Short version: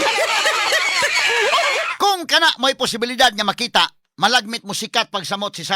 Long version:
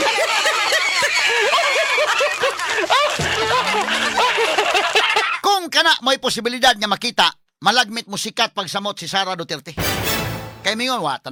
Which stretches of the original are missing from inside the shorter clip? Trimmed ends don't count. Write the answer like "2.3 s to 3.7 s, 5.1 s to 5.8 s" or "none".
1.9 s to 5.3 s